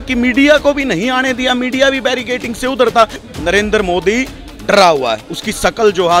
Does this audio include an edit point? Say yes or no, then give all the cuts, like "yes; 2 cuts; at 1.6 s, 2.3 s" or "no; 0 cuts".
yes; 1 cut; at 3.2 s